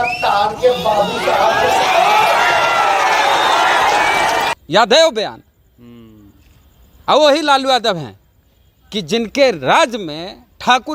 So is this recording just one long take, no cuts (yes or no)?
yes